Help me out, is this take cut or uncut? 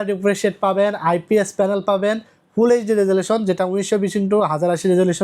uncut